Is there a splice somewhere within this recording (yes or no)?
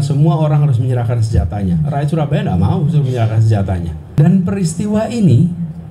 yes